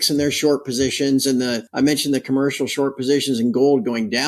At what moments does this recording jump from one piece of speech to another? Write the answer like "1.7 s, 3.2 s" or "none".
1.6 s